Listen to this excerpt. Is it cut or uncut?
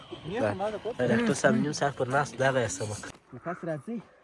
cut